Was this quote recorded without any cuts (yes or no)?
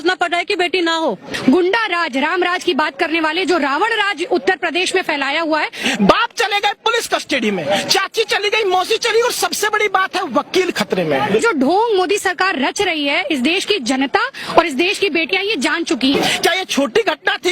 no